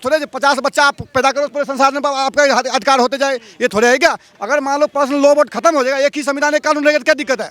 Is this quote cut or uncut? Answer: cut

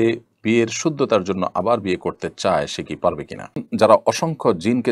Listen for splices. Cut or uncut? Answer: cut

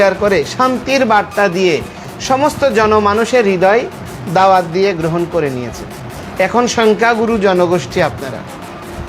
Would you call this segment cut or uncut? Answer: uncut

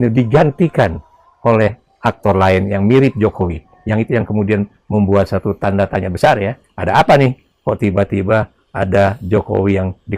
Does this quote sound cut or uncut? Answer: uncut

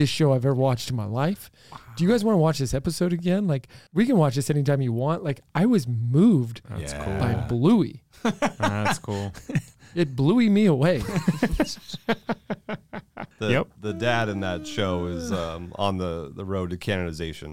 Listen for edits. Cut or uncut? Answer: cut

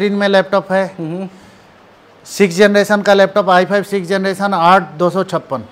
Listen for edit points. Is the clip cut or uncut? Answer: uncut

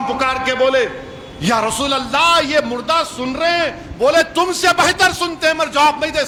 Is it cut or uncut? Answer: uncut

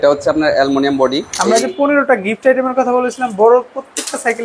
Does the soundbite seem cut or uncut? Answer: cut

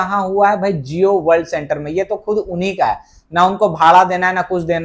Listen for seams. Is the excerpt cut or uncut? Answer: uncut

